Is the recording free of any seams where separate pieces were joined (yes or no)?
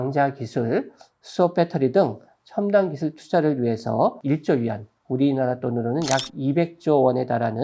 no